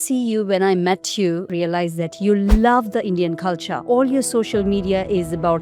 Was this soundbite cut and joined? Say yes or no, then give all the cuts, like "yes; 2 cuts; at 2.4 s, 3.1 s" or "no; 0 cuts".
yes; 2 cuts; at 1.5 s, 3.7 s